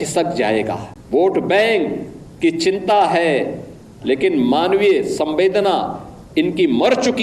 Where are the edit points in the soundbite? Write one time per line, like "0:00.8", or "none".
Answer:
0:00.9